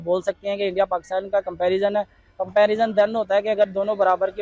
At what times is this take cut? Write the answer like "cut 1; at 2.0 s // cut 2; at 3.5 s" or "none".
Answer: none